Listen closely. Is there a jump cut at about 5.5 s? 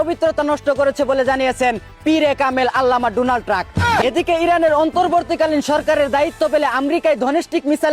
no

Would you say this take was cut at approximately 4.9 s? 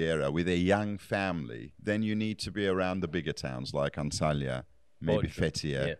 no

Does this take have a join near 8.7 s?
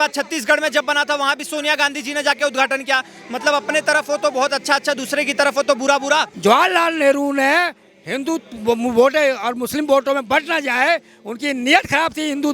no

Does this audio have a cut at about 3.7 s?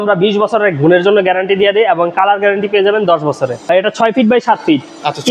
yes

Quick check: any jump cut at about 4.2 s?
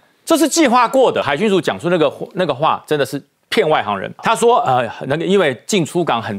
yes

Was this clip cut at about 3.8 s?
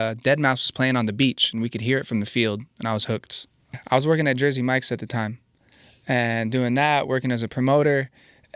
yes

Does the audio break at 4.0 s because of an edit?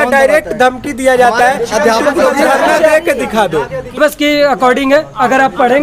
yes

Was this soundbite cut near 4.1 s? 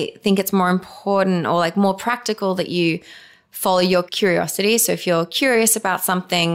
yes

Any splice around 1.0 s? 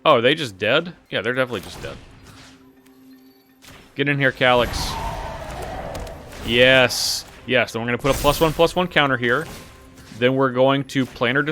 yes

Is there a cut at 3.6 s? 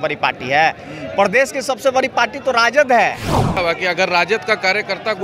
yes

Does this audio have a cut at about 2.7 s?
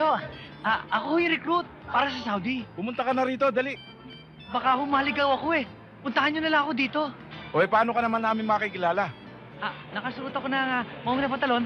yes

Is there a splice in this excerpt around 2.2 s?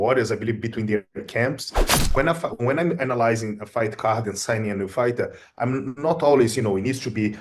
yes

